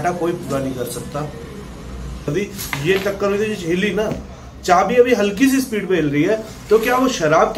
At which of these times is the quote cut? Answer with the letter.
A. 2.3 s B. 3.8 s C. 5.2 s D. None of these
A